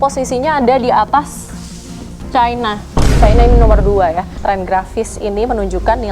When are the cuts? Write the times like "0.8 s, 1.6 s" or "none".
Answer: 4.3 s